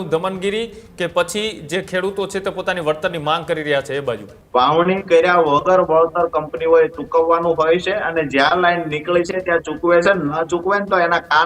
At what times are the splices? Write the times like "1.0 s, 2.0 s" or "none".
4.3 s